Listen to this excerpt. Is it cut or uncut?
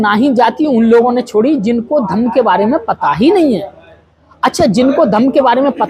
uncut